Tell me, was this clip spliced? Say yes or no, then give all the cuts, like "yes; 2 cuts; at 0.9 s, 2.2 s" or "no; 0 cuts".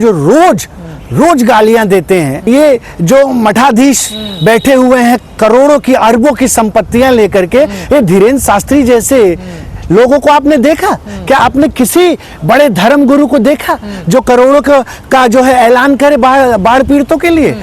yes; 1 cut; at 2.4 s